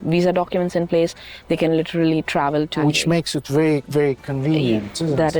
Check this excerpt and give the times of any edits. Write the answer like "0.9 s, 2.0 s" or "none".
2.8 s